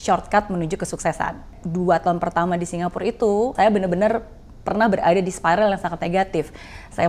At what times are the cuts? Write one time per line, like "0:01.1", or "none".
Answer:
0:01.5
0:03.5